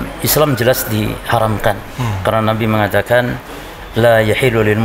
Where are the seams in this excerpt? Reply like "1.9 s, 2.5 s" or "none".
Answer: none